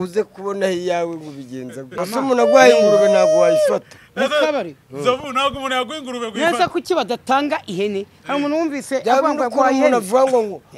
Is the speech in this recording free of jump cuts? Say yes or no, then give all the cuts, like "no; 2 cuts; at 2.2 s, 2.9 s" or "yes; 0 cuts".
no; 1 cut; at 1.9 s